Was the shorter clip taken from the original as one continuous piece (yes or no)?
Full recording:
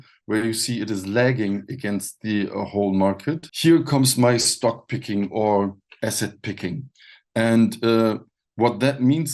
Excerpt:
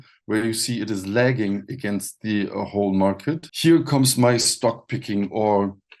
yes